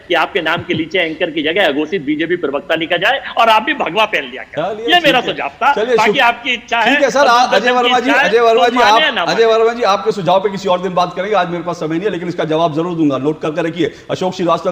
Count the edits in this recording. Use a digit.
0